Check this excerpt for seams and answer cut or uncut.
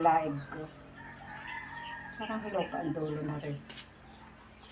uncut